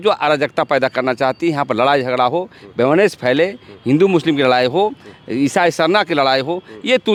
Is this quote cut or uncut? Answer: uncut